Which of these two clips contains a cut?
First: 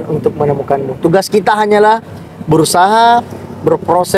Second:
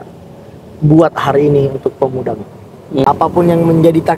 second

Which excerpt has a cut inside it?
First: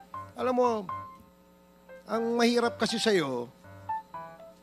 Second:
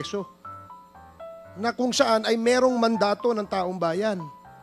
first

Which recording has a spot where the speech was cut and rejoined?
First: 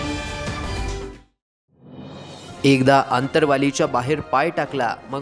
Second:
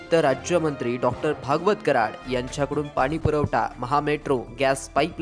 first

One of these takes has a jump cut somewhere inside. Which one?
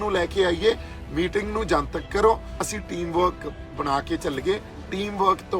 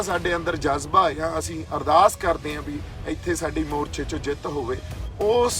first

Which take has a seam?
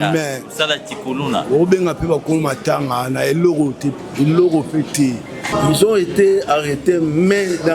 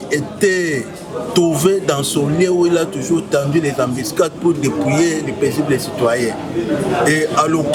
first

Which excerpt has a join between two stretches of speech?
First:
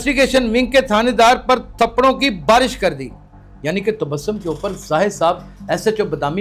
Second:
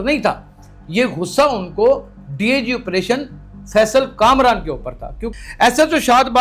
second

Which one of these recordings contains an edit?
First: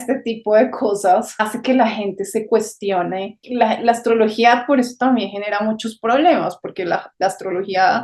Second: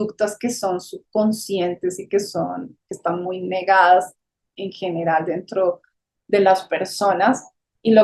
first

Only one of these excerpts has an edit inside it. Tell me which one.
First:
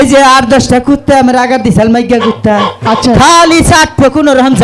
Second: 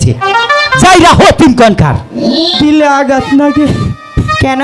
second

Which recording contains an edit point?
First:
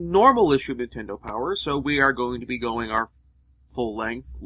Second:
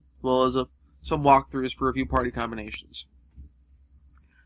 first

